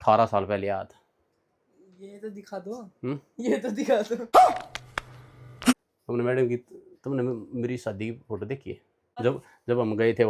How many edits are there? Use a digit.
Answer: 2